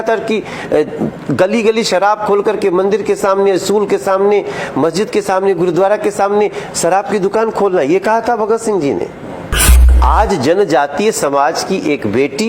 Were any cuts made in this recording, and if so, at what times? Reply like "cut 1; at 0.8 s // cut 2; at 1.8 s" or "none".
cut 1; at 9.8 s